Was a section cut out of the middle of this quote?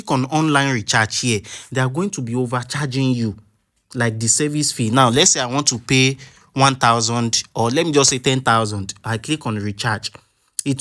no; 0 cuts

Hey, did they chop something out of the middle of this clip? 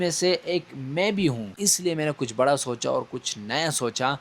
yes; 1 cut; at 1.6 s

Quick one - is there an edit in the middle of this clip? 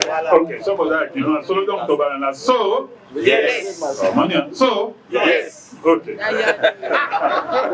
no; 0 cuts

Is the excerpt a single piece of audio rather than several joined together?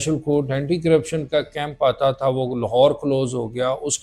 yes; 0 cuts

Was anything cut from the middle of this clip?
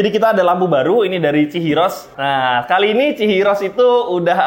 yes; 1 cut; at 2.1 s

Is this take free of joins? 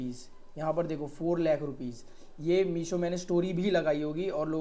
yes; 0 cuts

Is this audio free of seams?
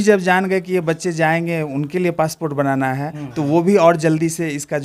yes; 0 cuts

